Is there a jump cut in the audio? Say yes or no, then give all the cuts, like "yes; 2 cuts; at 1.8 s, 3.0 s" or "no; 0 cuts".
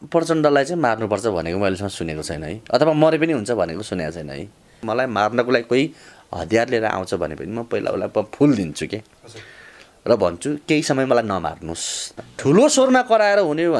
yes; 2 cuts; at 4.9 s, 12.1 s